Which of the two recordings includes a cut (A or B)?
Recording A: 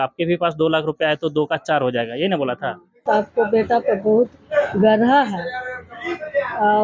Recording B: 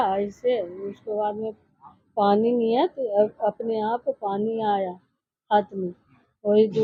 A